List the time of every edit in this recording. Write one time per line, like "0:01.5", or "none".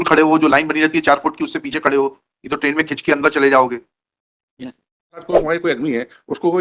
0:05.2